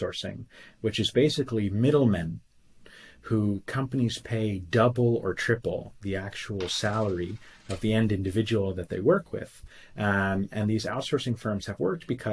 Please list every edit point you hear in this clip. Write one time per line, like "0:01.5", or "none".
none